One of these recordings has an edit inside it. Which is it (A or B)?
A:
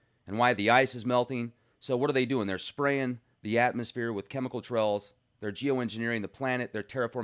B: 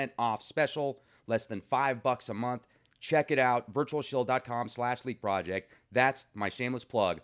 B